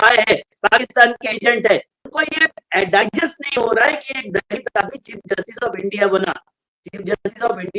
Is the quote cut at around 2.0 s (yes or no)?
yes